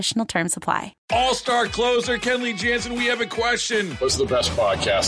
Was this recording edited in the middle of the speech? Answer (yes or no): yes